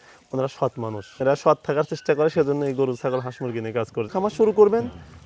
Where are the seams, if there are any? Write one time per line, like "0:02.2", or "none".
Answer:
0:01.1
0:04.0